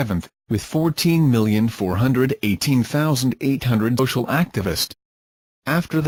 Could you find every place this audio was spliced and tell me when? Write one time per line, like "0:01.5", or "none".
none

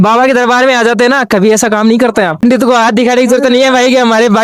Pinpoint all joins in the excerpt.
0:02.4

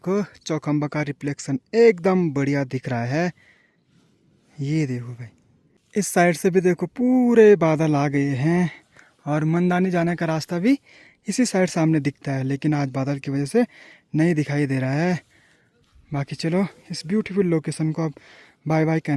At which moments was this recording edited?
none

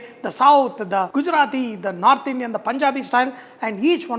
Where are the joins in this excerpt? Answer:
0:01.1

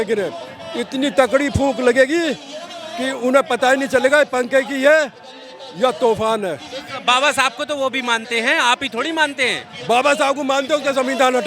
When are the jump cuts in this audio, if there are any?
none

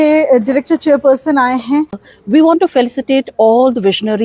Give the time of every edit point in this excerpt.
0:02.0

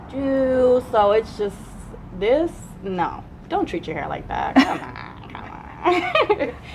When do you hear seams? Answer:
none

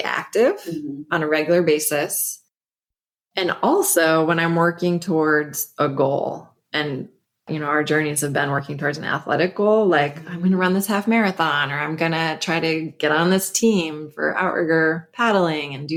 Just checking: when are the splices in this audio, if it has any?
none

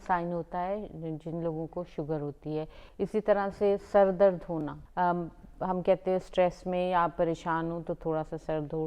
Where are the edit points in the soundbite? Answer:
0:02.8
0:04.8

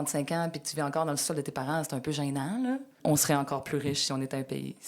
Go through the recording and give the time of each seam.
0:03.0

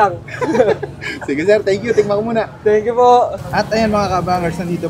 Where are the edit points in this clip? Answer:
none

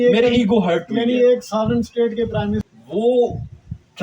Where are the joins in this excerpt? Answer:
0:02.7

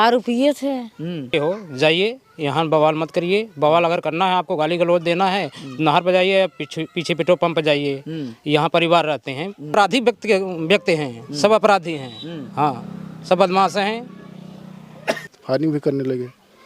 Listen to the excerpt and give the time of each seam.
0:01.3
0:09.7
0:15.4

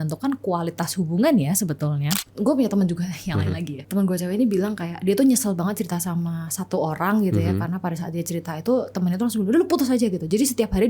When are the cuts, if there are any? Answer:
0:02.1

